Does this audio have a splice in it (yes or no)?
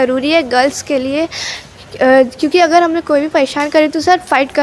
no